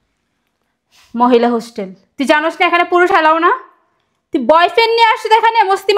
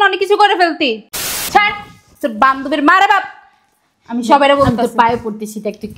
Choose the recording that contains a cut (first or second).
second